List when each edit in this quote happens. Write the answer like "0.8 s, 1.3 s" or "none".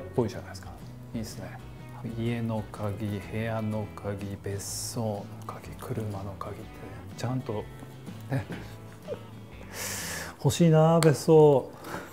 1.9 s

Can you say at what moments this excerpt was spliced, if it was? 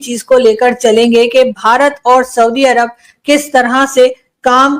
none

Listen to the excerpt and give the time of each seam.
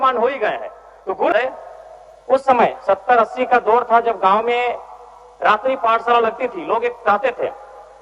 1.3 s

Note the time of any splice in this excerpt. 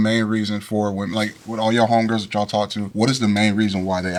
none

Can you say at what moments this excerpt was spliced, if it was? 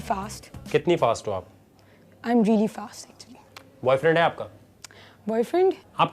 1.2 s

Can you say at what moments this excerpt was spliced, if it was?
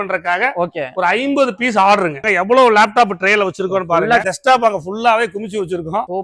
2.2 s, 4.2 s

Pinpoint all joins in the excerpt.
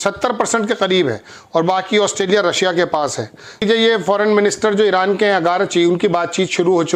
3.6 s

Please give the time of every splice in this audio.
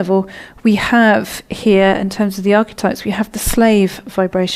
1.5 s

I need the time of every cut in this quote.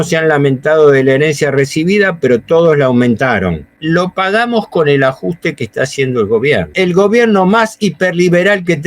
3.7 s, 6.7 s

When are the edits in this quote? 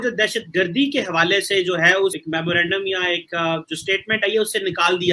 2.2 s

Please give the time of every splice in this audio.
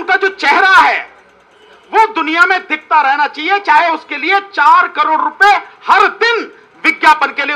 none

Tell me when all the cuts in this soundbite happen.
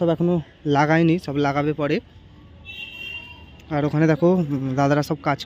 none

